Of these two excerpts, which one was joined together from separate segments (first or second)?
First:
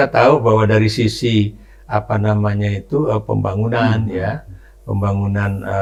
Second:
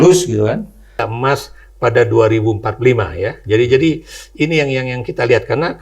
second